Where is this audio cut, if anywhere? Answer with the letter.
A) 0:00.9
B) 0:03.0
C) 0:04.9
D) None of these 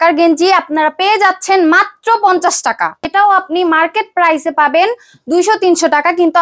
B